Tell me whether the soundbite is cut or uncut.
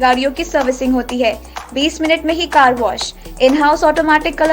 uncut